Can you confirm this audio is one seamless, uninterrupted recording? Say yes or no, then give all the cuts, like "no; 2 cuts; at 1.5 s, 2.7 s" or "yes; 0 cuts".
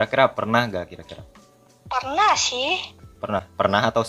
yes; 0 cuts